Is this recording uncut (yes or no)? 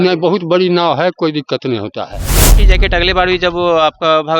no